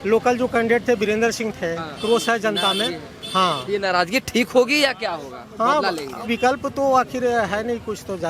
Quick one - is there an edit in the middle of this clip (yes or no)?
yes